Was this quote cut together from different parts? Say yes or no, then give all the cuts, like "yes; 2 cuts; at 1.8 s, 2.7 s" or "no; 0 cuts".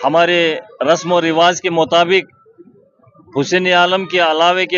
no; 0 cuts